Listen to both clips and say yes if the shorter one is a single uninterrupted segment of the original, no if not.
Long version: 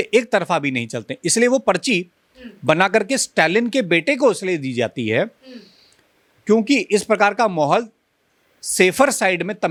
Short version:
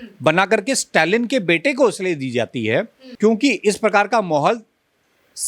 no